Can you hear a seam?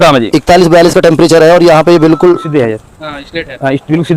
yes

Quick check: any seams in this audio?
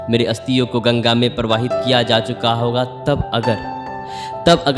no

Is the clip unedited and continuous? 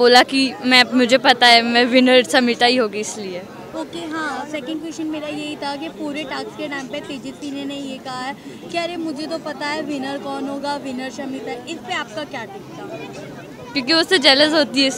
yes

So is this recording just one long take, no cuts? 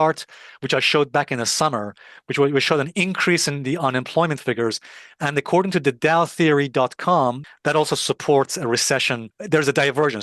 no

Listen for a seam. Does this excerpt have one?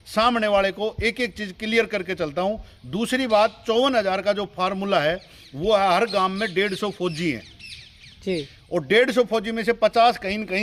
no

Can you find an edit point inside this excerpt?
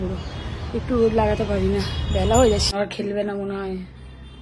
yes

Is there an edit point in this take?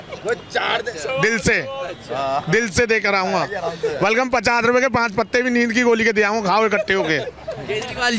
no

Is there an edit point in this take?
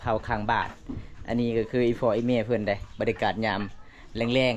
no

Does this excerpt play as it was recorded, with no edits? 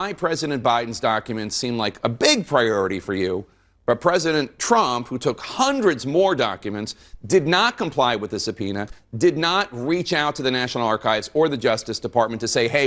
yes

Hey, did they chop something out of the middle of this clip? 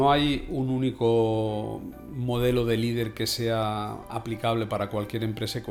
no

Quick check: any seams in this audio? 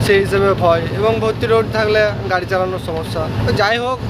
no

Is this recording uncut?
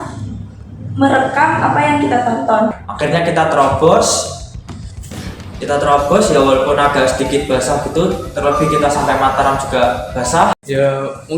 no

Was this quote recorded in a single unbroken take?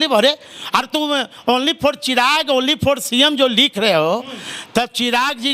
yes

